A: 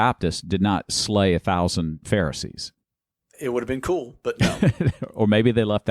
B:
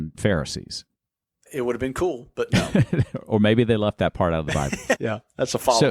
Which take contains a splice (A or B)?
A